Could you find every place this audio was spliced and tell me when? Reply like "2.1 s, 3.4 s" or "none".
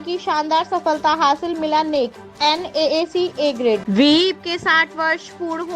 3.9 s